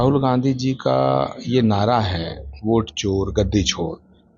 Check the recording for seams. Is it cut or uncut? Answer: uncut